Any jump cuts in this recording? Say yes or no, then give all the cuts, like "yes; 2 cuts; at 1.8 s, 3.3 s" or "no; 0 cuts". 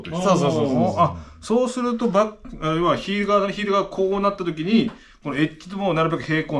no; 0 cuts